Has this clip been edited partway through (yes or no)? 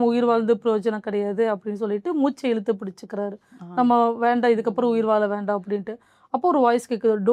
no